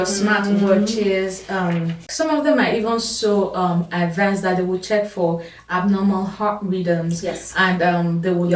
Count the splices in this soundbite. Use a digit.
1